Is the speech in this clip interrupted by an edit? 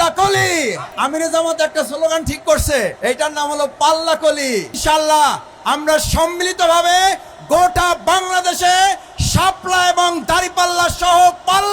yes; 3 cuts; at 0.9 s, 3.0 s, 4.8 s

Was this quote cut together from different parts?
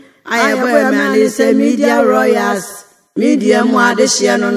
no; 0 cuts

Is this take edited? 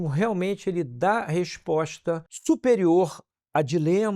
yes; 1 cut; at 2.3 s

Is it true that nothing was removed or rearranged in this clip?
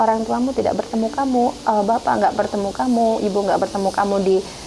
yes; 0 cuts

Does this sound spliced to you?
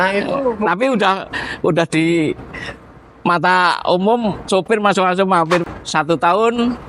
yes; 1 cut; at 5.6 s

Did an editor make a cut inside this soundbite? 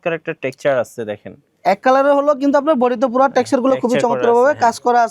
no; 0 cuts

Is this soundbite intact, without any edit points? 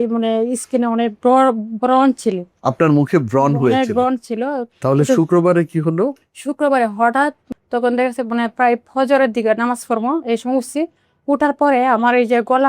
no; 2 cuts; at 4.7 s, 7.4 s

